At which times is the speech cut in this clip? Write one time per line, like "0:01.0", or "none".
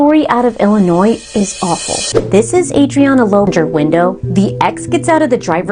0:03.5